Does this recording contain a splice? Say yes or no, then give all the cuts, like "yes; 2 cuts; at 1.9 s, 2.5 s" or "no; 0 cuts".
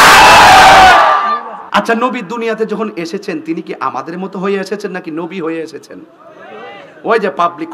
yes; 1 cut; at 1.5 s